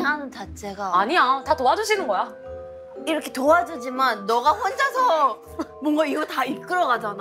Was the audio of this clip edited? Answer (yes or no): no